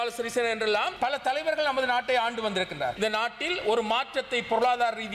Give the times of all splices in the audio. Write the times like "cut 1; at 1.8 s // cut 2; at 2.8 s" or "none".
cut 1; at 0.9 s // cut 2; at 2.9 s